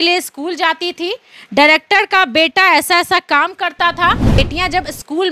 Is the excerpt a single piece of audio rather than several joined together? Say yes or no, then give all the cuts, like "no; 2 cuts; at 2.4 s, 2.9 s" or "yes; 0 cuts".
no; 1 cut; at 4.4 s